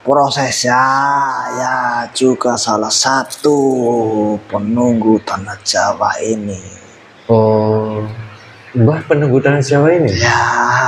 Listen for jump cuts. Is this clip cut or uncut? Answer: cut